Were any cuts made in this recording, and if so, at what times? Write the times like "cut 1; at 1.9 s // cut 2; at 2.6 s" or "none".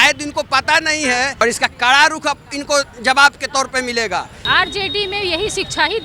cut 1; at 1.4 s // cut 2; at 4.4 s

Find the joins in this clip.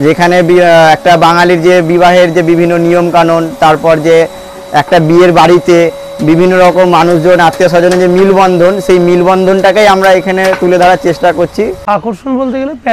cut 1; at 11.8 s

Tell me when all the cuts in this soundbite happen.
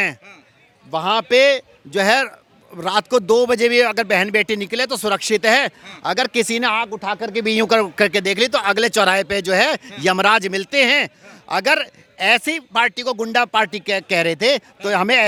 none

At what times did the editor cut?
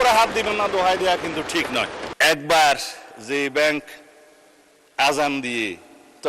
cut 1; at 2.0 s

